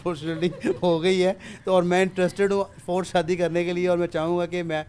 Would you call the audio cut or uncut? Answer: uncut